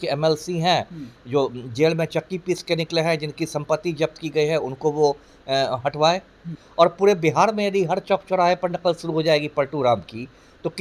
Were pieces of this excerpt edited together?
yes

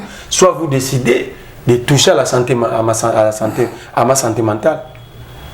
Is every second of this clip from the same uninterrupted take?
yes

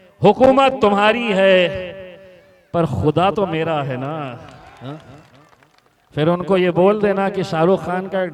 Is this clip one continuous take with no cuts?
no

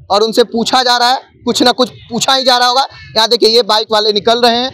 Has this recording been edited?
no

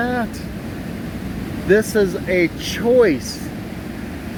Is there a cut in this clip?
no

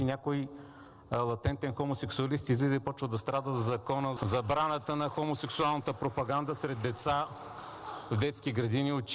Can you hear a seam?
yes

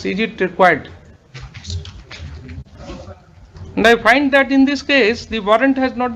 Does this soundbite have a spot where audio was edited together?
no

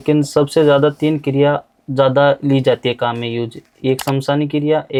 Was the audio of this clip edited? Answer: no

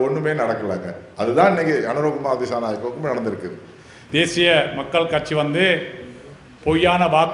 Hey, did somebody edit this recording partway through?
yes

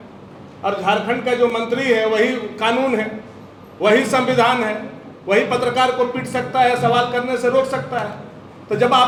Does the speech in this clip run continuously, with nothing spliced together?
yes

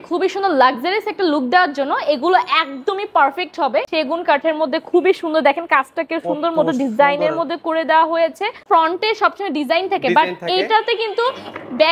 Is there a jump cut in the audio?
yes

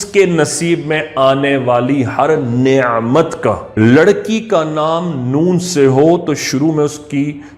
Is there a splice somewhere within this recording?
yes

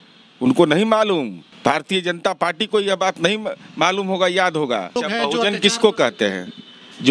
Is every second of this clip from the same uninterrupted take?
no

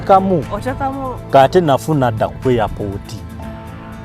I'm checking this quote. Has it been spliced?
no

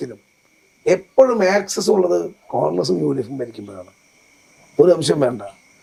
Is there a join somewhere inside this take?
no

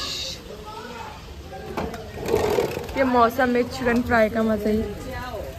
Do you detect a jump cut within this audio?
no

